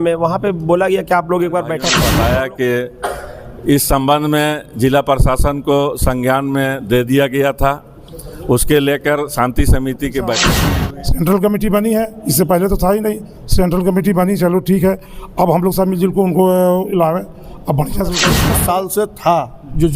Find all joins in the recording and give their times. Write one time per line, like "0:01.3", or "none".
0:01.9
0:10.6
0:18.4